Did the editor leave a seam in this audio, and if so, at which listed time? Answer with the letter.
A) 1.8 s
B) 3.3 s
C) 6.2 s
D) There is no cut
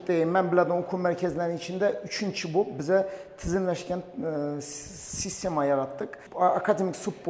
C